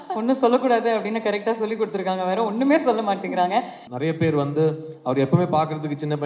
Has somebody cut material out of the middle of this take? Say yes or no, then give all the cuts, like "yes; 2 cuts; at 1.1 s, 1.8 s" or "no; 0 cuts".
yes; 1 cut; at 3.8 s